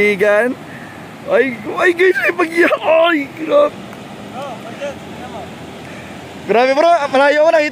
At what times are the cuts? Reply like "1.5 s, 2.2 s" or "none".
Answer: 3.8 s